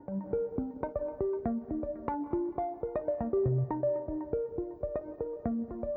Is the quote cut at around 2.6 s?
no; 0 cuts

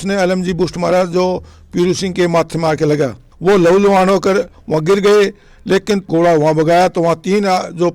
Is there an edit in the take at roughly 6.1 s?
yes; 1 cut; at 6.1 s

